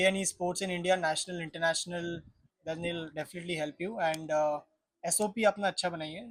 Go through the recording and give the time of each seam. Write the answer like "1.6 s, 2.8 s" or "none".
none